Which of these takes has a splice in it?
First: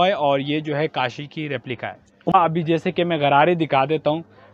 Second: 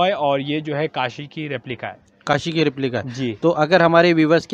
first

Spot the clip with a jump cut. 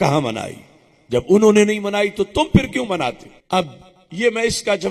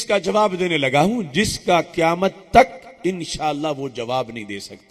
first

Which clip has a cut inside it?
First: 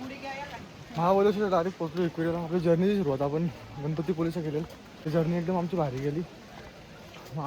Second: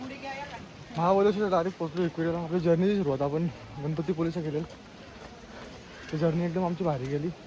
first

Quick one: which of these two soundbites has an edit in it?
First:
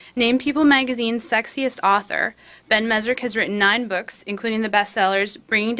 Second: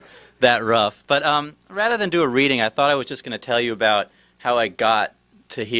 first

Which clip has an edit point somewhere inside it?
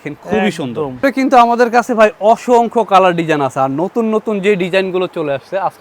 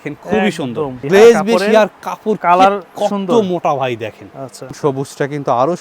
second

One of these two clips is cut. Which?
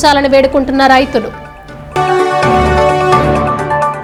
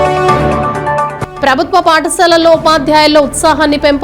second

